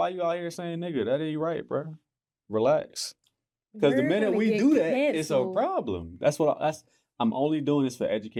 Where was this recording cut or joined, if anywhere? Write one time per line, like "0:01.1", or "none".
none

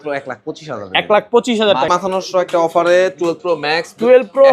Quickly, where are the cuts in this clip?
0:01.9

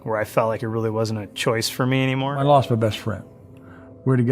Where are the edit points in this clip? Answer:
0:02.3

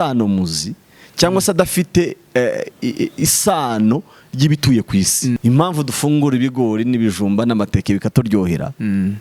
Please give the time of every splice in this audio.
0:05.4

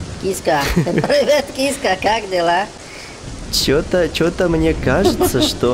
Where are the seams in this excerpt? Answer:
none

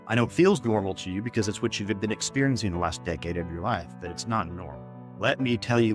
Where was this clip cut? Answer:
none

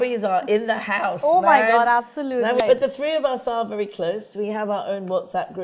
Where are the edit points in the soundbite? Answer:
0:02.6

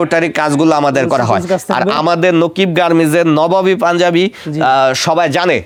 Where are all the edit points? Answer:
none

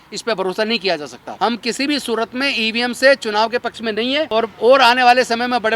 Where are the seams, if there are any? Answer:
0:01.2
0:04.3

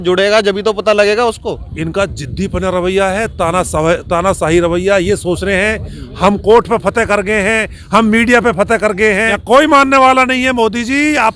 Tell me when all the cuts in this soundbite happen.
0:01.7
0:09.2

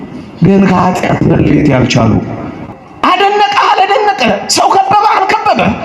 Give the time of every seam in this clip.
0:02.7

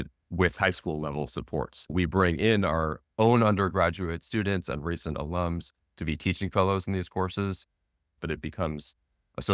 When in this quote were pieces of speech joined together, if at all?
0:08.2

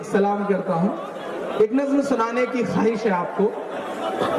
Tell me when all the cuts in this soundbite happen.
none

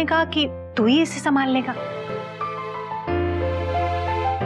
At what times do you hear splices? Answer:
0:01.9

